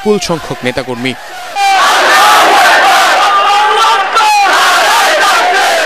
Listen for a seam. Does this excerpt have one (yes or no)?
no